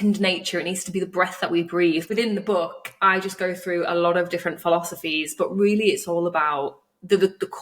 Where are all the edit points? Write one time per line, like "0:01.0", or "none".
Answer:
0:02.1